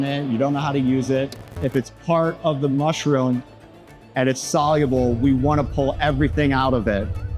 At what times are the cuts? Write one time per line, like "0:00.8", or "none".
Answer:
0:01.4